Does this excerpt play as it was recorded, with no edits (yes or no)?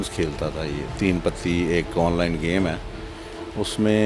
yes